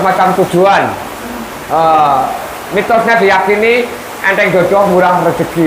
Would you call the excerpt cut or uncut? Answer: uncut